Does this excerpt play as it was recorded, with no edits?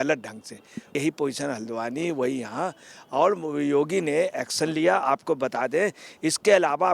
no; 1 cut; at 1.0 s

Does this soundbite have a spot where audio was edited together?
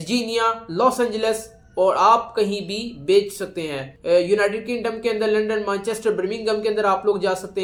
no; 0 cuts

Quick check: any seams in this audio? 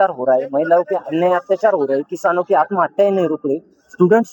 no; 0 cuts

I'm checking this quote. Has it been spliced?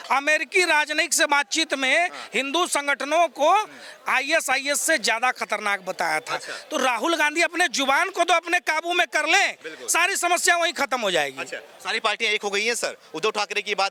no; 0 cuts

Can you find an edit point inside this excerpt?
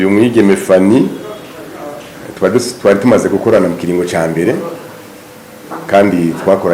no; 0 cuts

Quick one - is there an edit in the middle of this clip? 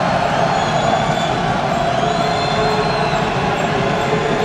no; 0 cuts

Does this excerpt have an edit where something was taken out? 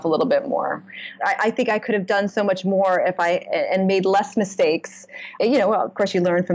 yes; 2 cuts; at 1.1 s, 5.3 s

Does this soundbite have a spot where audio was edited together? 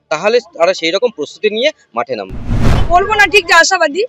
yes; 1 cut; at 2.8 s

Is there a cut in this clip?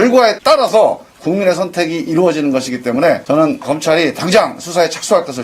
no; 0 cuts

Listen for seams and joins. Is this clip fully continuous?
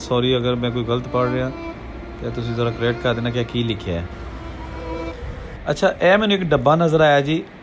no; 1 cut; at 5.1 s

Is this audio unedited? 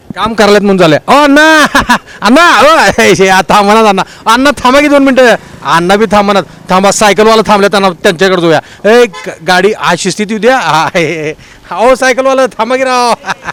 yes; 0 cuts

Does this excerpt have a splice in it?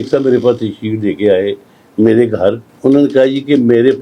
yes; 1 cut; at 2.7 s

